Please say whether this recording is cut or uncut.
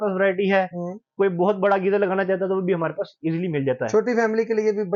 uncut